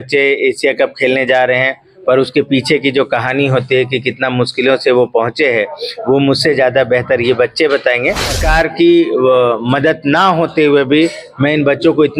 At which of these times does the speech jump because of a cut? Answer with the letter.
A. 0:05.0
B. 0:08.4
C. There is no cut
B